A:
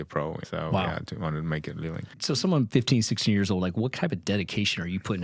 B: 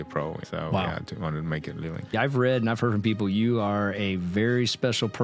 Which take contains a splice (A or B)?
B